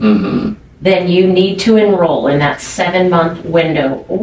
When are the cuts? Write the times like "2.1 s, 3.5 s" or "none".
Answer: none